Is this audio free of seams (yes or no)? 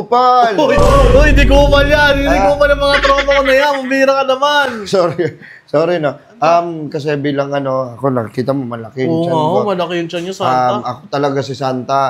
yes